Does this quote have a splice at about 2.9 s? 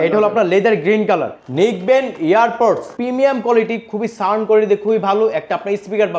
yes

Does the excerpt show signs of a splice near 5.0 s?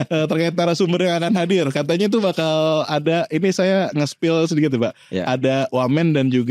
no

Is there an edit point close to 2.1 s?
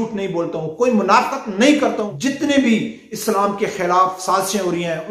yes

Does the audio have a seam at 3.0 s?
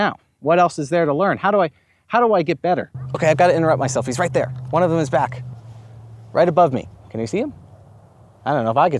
yes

